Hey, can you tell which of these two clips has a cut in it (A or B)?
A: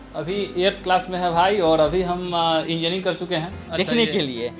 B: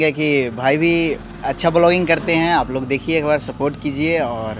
A